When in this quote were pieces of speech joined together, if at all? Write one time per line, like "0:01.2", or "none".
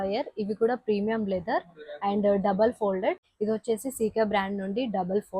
0:03.2

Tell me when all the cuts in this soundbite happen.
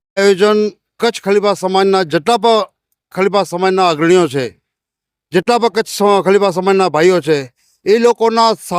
none

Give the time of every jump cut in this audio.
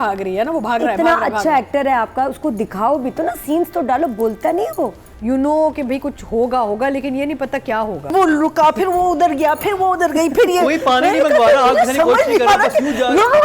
0:05.1
0:08.1

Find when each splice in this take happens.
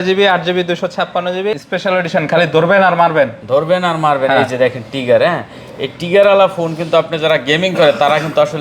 0:01.6

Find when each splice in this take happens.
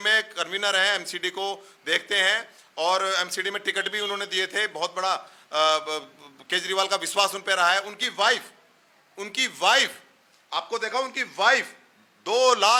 none

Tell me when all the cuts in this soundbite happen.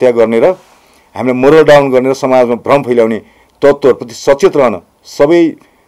none

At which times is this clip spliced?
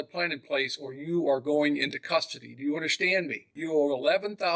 0:03.4

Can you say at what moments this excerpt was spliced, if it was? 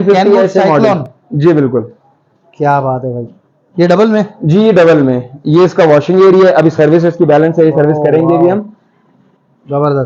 none

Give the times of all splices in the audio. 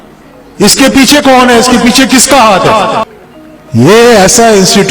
0:03.1

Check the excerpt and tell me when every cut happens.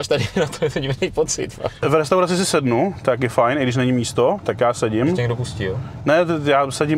0:01.8

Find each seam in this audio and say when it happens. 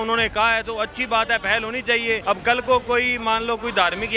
0:02.2

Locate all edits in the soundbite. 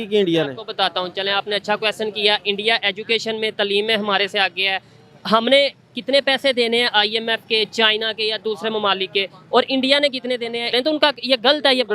0:10.7

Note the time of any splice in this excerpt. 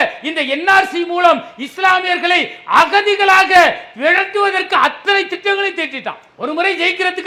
none

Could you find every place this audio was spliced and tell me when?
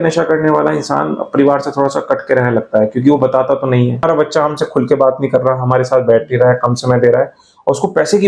0:04.0

